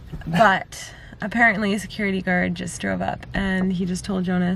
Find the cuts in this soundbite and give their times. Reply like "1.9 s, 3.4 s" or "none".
none